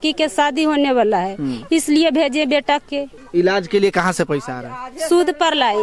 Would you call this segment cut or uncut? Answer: cut